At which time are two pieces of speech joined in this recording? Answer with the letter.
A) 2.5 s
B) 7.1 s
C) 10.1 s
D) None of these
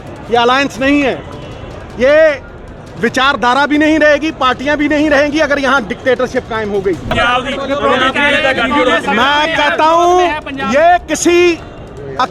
B